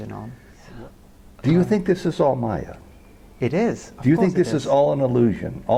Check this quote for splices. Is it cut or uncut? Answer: uncut